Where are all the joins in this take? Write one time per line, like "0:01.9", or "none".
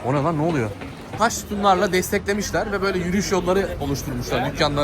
0:01.1